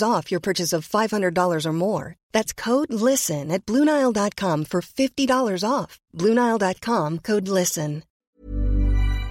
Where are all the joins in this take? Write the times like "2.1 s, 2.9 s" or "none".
8.4 s